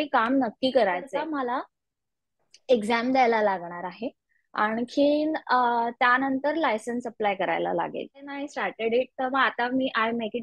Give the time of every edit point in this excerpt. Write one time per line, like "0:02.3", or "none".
0:01.2
0:08.4